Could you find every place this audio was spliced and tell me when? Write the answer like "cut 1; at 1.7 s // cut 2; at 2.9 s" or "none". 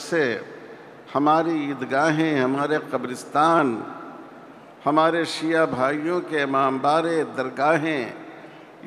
none